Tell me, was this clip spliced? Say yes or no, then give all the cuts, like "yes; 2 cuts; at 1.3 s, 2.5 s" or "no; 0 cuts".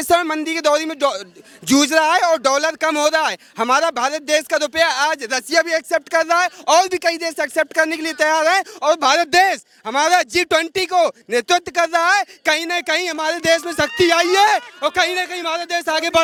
no; 0 cuts